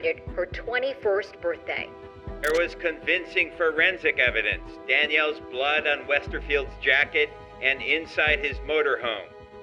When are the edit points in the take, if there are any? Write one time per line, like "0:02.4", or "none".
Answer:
0:02.5